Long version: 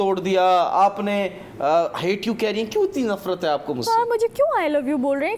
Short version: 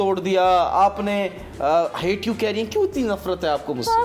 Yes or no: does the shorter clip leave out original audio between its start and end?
no